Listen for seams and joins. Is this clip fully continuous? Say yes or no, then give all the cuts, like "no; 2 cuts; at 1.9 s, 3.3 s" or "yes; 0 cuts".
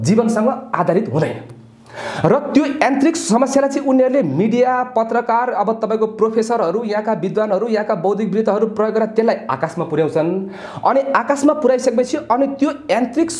yes; 0 cuts